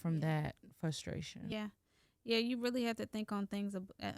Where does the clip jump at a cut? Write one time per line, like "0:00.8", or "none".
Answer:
0:01.5